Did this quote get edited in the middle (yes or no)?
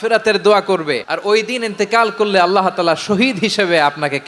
yes